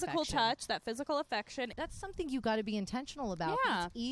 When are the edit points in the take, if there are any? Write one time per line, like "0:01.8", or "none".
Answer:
0:01.7